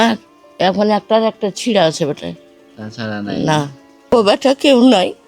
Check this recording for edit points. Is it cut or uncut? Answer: cut